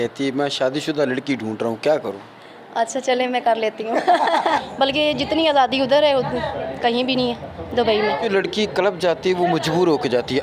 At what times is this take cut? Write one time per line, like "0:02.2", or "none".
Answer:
0:04.6
0:08.2